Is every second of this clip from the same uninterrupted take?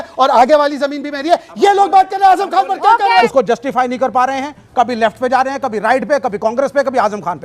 no; 1 cut; at 3.2 s

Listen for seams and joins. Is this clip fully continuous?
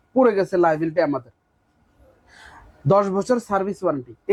yes; 0 cuts

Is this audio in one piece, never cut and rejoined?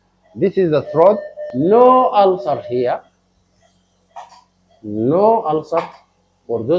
no; 1 cut; at 1.4 s

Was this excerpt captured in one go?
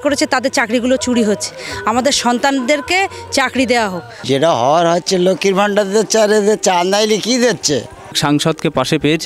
no; 2 cuts; at 4.2 s, 8.2 s

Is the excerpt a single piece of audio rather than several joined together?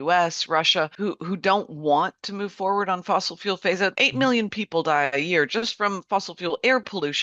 no; 2 cuts; at 0.9 s, 3.9 s

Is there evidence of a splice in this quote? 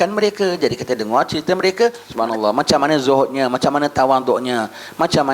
yes; 1 cut; at 2.1 s

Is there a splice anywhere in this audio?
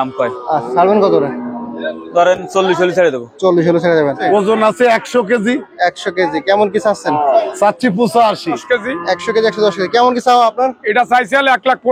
yes; 2 cuts; at 4.2 s, 8.6 s

